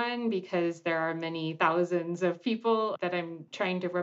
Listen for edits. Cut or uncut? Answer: cut